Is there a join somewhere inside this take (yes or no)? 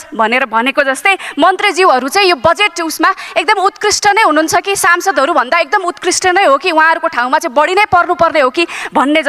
no